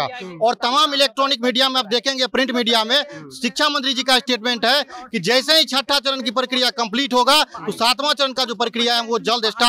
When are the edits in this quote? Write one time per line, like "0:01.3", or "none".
none